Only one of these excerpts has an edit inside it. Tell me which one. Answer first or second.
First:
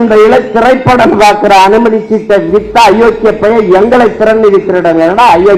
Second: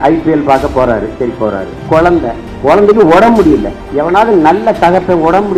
second